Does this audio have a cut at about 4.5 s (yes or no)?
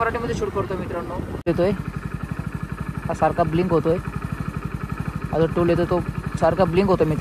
no